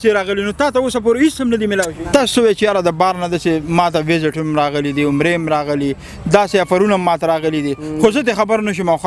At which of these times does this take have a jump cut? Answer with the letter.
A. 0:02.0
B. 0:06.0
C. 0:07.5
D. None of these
A